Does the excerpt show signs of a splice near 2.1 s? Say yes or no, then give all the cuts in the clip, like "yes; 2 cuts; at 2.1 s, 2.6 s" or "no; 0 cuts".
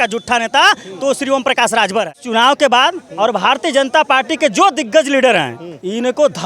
yes; 1 cut; at 2.1 s